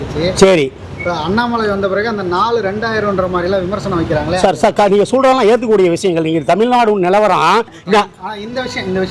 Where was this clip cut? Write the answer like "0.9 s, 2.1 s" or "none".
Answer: 7.8 s